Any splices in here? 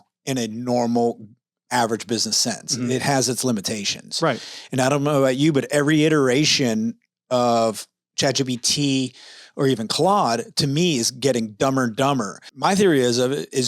yes; 1 cut; at 12.4 s

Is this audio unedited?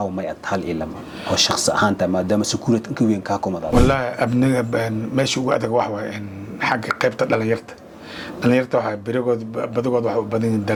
yes; 0 cuts

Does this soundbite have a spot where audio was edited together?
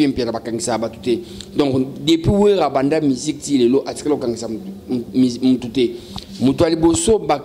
no; 0 cuts

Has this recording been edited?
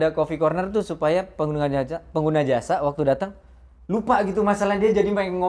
no; 0 cuts

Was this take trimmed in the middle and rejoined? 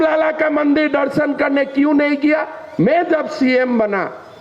yes; 1 cut; at 2.6 s

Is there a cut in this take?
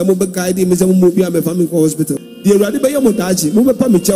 yes; 1 cut; at 2.2 s

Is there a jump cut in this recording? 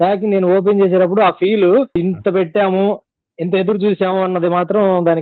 no; 0 cuts

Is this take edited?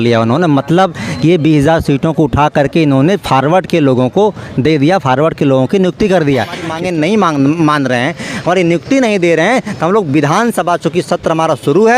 yes; 1 cut; at 6.7 s

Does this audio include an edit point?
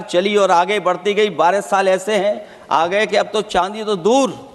no; 0 cuts

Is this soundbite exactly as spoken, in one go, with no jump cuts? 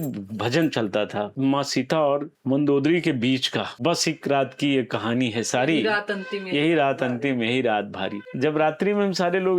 no; 4 cuts; at 1.3 s, 2.3 s, 3.7 s, 8.2 s

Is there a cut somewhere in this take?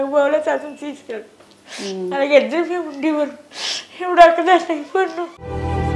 no; 0 cuts

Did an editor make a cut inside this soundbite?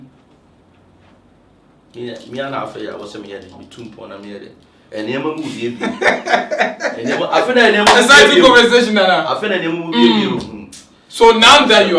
no; 0 cuts

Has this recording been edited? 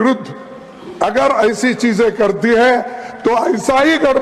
no; 0 cuts

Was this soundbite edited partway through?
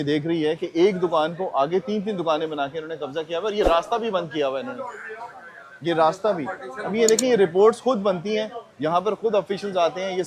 no; 0 cuts

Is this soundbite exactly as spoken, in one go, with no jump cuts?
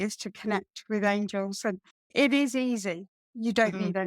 no; 1 cut; at 2.1 s

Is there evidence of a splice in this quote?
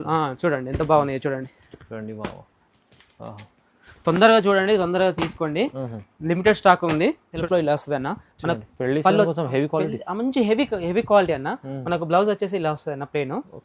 yes; 1 cut; at 7.3 s

